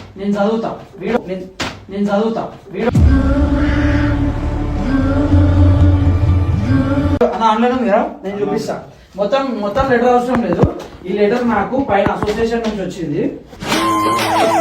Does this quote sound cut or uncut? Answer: uncut